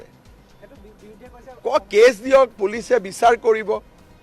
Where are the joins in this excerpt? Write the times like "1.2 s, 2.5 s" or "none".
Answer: none